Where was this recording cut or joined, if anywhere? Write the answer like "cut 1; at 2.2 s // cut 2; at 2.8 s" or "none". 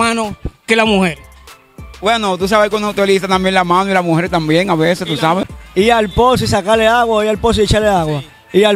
cut 1; at 5.6 s